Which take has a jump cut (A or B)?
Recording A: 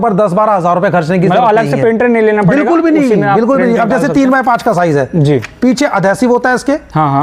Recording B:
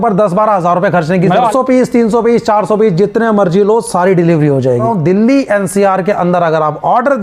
B